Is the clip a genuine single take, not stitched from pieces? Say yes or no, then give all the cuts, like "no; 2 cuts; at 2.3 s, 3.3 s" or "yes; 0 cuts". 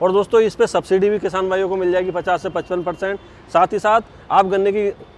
yes; 0 cuts